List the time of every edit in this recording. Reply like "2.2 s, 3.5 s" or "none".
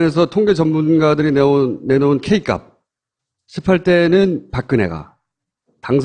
4.4 s